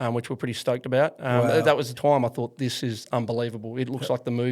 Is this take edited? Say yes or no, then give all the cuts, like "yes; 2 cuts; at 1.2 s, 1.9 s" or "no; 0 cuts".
yes; 1 cut; at 1.9 s